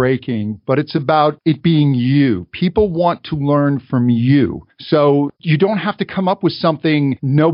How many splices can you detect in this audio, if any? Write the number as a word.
one